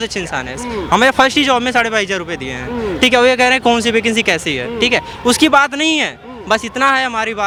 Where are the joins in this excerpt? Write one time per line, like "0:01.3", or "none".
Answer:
none